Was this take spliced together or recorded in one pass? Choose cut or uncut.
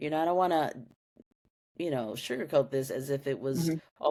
uncut